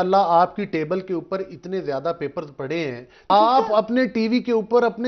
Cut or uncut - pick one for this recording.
cut